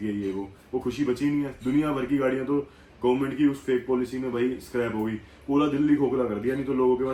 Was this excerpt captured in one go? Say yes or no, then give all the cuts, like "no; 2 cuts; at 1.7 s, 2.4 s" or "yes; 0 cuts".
yes; 0 cuts